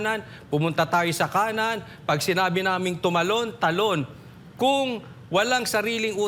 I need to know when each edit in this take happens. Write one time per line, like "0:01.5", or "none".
none